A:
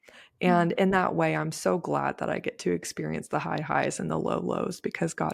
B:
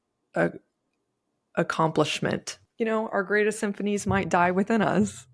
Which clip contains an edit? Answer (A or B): B